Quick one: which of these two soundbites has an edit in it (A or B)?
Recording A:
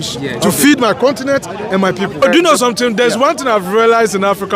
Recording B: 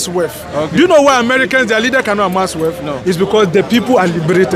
A